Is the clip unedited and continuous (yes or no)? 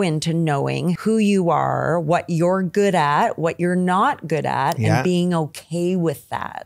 no